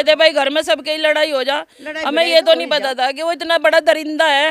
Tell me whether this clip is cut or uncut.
uncut